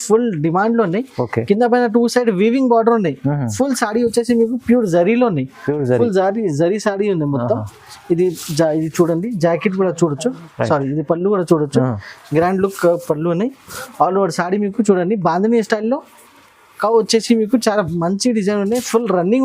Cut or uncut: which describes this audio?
uncut